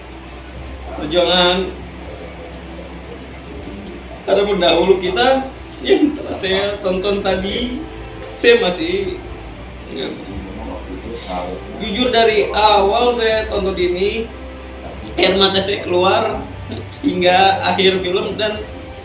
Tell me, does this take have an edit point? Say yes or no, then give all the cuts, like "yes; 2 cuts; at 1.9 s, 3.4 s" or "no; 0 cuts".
no; 0 cuts